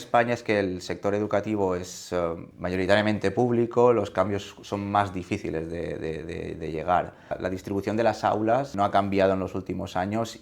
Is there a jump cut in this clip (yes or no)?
yes